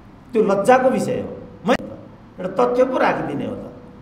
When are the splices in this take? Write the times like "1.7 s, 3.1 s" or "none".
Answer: none